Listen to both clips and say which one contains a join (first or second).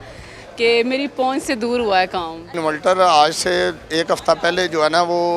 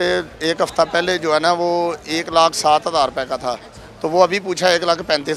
first